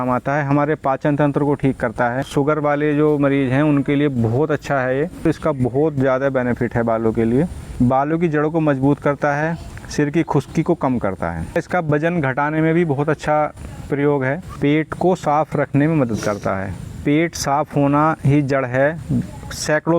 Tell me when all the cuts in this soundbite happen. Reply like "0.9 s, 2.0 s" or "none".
2.3 s, 5.2 s, 7.6 s, 11.6 s, 14.5 s, 16.9 s

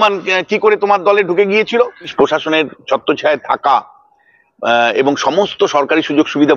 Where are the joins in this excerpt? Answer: 2.1 s

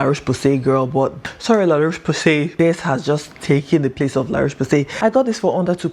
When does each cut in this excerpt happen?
1.2 s, 2.5 s, 4.9 s

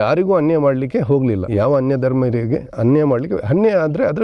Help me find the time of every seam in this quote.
1.4 s

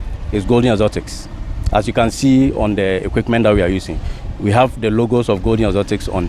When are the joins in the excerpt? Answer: none

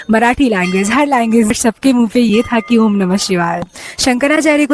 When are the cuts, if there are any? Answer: 1.6 s, 3.7 s

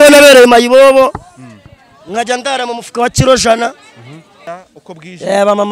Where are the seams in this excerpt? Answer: 4.5 s

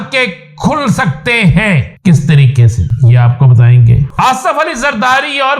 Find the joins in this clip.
1.9 s, 2.8 s, 4.1 s

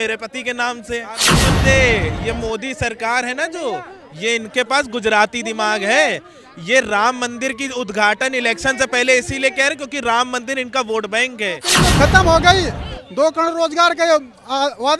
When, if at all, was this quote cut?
1.3 s, 11.7 s

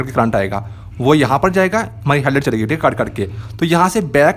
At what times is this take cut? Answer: none

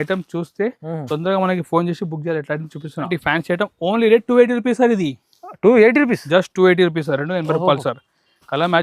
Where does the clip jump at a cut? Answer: 3.1 s

